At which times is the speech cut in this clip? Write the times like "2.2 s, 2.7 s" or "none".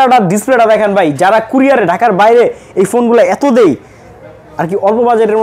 none